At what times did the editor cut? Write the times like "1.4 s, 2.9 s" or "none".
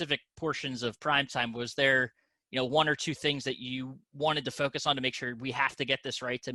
none